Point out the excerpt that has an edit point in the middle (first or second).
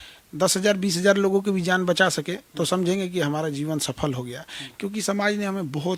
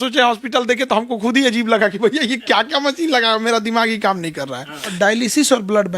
second